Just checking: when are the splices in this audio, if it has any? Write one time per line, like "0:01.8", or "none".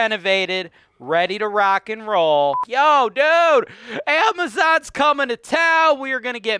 0:02.6